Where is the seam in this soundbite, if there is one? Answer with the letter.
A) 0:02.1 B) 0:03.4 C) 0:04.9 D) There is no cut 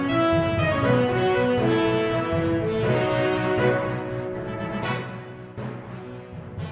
D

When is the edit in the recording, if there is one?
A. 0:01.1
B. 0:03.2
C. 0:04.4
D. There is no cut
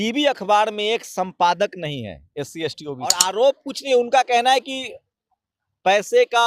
B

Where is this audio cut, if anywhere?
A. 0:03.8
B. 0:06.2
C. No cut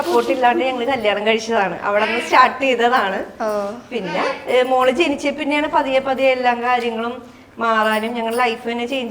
C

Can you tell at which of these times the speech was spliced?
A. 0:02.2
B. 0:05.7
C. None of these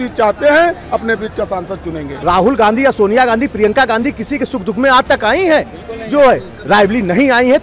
A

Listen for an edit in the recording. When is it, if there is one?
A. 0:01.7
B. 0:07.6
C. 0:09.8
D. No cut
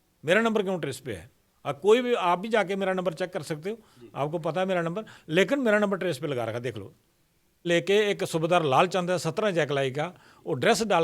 B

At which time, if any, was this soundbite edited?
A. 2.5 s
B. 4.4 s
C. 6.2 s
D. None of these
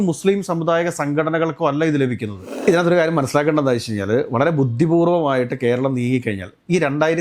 A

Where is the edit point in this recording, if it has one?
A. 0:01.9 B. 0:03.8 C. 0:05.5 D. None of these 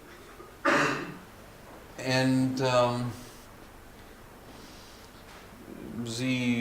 C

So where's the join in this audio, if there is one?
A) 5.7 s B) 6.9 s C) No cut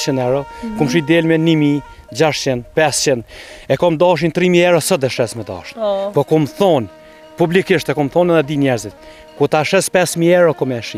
C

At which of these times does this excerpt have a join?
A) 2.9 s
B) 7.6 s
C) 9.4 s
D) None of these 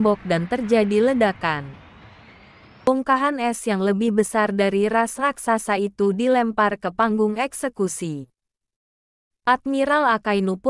A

